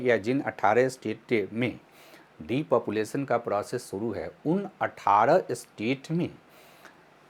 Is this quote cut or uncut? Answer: uncut